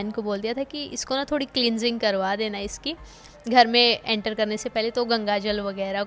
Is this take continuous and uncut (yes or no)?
yes